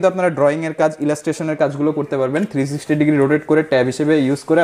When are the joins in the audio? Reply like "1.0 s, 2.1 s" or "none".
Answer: none